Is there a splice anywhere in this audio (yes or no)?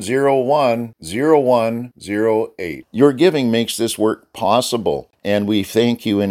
yes